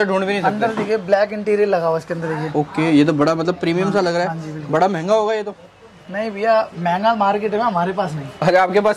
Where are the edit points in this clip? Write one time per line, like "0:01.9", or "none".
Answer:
none